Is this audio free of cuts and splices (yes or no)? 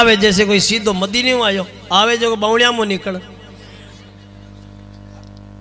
yes